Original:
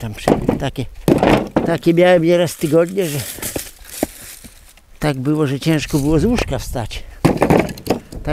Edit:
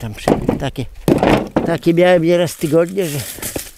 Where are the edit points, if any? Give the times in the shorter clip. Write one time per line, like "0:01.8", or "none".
none